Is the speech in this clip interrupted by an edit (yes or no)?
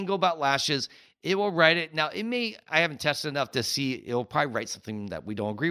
no